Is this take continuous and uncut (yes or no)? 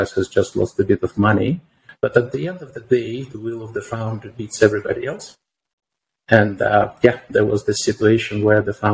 no